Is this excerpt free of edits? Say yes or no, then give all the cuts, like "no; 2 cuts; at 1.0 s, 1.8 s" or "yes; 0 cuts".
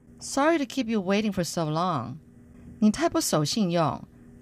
no; 1 cut; at 2.4 s